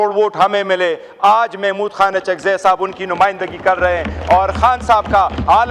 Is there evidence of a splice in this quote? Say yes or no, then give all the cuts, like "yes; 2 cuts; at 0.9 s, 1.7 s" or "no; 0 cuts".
no; 0 cuts